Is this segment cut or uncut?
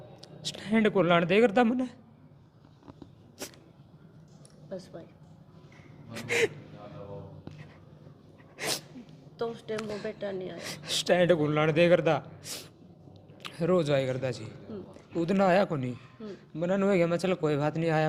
uncut